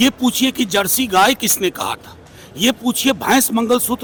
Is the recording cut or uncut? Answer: uncut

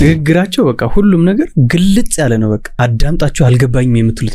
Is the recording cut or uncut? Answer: cut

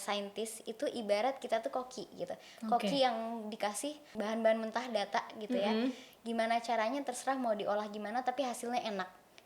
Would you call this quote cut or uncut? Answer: cut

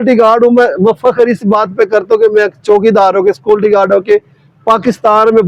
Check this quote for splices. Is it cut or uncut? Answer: uncut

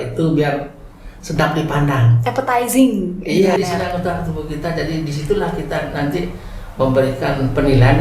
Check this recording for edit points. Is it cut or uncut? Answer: cut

